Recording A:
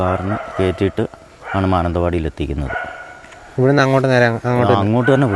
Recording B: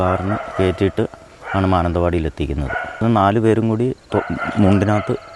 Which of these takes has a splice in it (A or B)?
B